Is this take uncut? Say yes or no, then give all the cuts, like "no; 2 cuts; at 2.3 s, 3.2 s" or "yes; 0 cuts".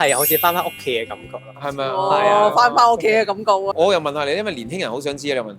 no; 1 cut; at 3.7 s